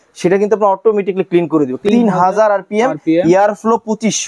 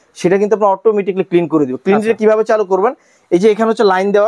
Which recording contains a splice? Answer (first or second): first